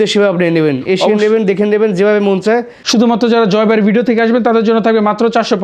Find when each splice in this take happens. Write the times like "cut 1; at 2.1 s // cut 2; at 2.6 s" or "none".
cut 1; at 2.9 s